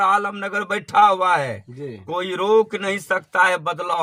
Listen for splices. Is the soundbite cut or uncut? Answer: uncut